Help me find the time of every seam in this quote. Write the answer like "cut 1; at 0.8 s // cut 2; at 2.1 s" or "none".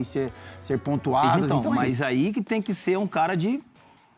cut 1; at 1.5 s